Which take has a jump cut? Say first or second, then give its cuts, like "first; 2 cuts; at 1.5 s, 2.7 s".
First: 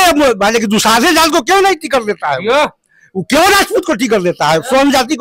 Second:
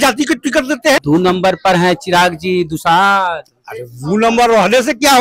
second; 1 cut; at 1.0 s